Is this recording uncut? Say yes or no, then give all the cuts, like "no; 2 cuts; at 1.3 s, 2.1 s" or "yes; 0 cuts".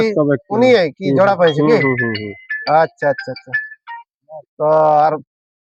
yes; 0 cuts